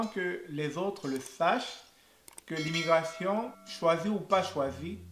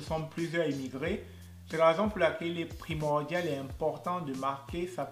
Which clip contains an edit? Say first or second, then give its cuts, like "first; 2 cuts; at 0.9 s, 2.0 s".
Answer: second; 1 cut; at 1.6 s